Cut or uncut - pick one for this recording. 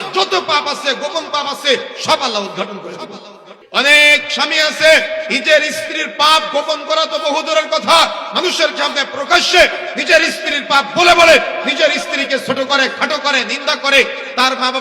cut